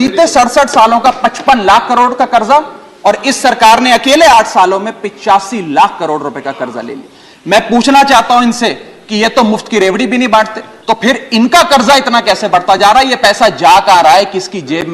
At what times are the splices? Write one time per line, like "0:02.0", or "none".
0:10.7

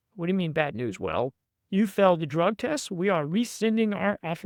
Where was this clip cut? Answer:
none

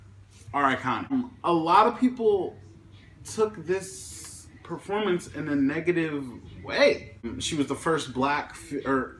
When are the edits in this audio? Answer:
0:01.1
0:07.3

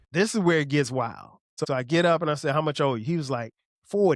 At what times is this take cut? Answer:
0:01.6

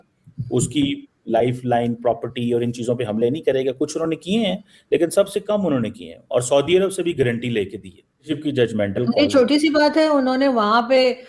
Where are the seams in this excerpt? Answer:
0:08.3

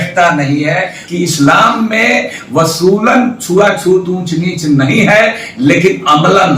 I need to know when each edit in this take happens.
0:01.0

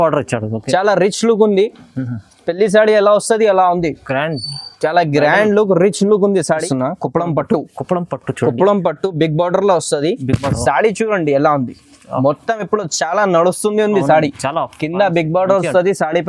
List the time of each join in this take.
0:06.6

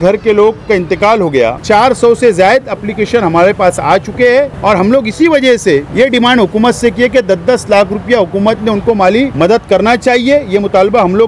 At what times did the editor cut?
0:01.6
0:04.5
0:05.9
0:09.3

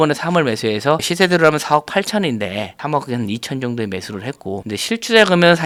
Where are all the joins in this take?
none

